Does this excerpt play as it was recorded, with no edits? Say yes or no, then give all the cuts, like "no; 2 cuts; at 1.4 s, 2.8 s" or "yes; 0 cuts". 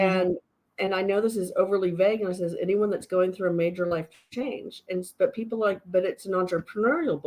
yes; 0 cuts